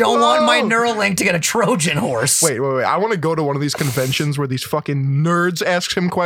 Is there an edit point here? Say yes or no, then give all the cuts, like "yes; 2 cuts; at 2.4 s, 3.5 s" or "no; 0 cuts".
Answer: no; 0 cuts